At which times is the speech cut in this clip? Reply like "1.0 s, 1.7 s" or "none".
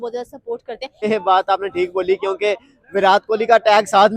1.0 s